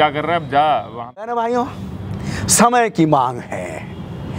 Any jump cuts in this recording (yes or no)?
yes